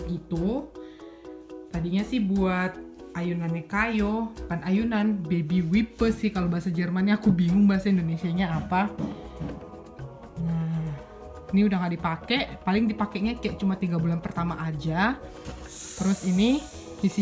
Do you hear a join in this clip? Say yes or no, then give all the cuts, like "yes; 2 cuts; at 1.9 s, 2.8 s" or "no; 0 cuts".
no; 0 cuts